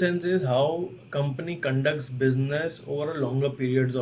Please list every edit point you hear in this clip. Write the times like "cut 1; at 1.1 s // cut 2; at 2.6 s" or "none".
none